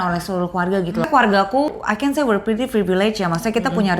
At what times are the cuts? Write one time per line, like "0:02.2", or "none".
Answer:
0:01.1
0:01.7